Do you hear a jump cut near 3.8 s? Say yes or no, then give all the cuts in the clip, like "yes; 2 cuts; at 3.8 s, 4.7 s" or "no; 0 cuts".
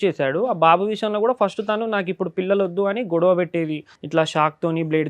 no; 0 cuts